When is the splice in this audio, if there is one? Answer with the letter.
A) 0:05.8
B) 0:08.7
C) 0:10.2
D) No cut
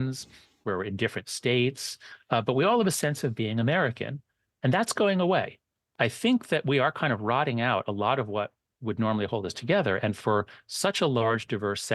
A